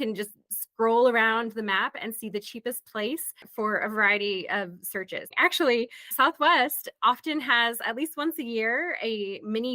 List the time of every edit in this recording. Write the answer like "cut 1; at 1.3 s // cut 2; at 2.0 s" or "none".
cut 1; at 5.3 s